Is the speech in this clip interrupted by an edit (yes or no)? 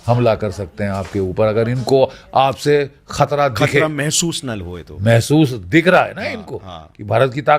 no